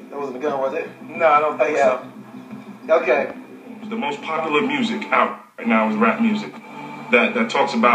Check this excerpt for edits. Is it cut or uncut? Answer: cut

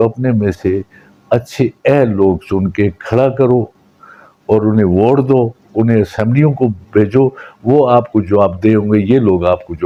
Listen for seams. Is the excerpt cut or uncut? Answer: uncut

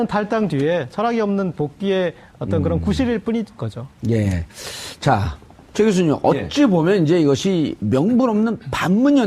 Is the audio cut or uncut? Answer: cut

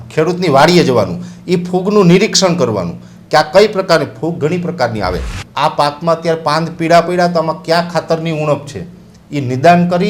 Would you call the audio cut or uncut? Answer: cut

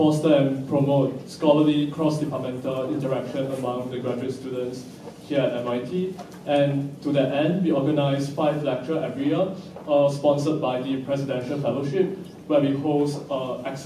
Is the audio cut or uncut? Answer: cut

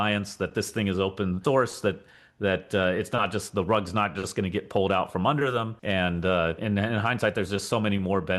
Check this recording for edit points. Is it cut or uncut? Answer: cut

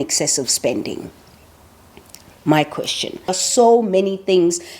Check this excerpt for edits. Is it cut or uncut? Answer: cut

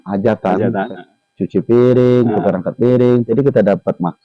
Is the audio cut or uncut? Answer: cut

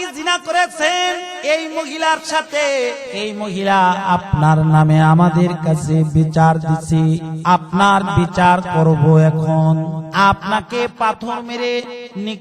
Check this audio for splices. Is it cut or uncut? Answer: cut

